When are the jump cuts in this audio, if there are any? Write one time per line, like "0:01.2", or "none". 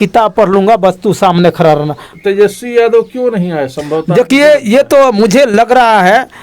0:02.1